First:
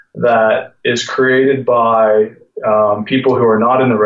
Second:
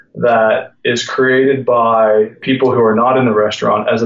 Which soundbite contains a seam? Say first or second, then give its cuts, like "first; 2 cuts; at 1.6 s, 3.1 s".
second; 1 cut; at 2.4 s